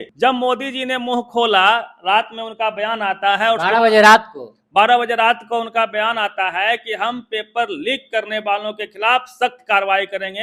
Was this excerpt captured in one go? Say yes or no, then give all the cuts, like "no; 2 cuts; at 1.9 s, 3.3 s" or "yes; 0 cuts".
yes; 0 cuts